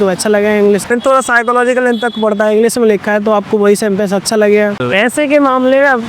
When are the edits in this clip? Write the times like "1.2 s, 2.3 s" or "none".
0.8 s, 4.8 s